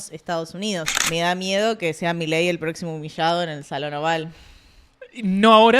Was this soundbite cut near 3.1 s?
no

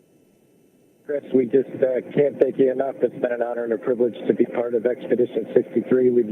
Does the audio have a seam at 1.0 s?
yes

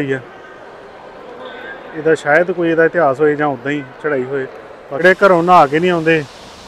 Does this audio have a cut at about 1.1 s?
no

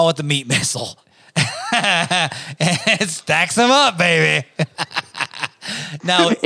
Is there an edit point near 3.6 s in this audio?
no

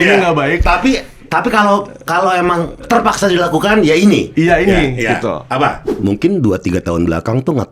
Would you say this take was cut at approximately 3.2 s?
no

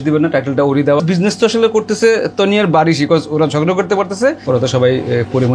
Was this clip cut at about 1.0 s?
yes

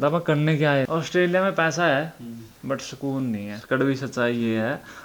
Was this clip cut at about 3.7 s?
yes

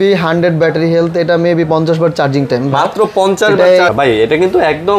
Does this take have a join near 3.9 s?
yes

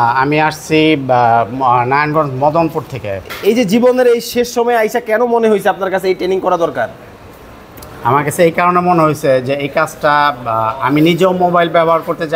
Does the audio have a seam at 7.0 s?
no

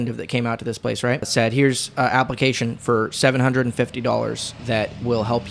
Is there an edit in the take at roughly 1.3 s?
yes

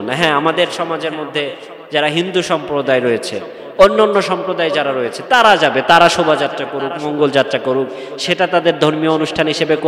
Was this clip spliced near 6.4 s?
no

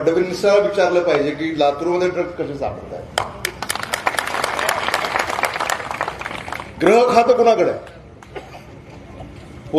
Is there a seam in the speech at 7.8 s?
no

